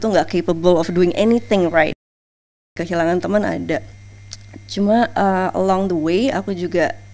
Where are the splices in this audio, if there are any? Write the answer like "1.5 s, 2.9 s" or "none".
2.1 s